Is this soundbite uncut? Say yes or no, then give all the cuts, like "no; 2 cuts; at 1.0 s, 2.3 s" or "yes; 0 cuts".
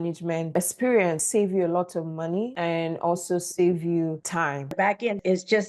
no; 2 cuts; at 1.2 s, 4.8 s